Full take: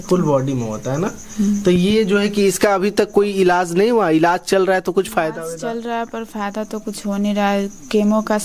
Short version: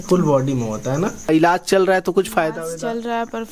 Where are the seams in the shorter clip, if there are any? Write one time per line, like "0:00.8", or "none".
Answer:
0:01.3